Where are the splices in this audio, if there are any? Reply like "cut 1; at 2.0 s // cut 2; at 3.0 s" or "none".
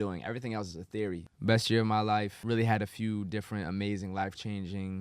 cut 1; at 1.3 s // cut 2; at 2.4 s